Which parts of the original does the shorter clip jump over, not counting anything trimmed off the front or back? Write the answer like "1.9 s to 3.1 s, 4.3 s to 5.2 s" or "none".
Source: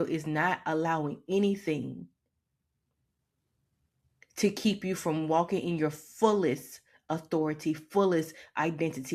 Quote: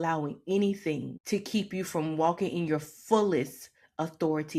2.0 s to 4.2 s